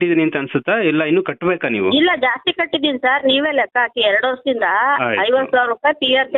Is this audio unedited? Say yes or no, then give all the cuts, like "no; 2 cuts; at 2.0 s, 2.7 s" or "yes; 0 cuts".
yes; 0 cuts